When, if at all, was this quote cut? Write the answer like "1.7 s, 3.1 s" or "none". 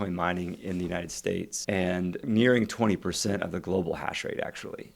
1.6 s